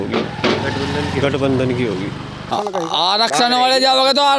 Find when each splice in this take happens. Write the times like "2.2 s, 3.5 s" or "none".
2.5 s